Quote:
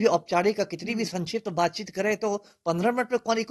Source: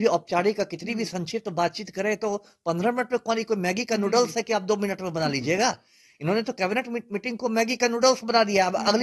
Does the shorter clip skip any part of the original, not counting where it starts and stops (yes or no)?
no